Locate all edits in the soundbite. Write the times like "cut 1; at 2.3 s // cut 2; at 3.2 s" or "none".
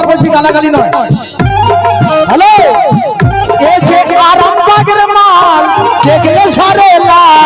none